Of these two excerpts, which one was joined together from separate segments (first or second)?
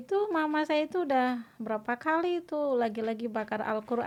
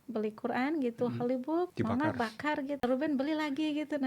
second